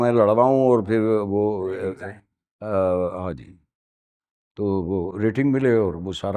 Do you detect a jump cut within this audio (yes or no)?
no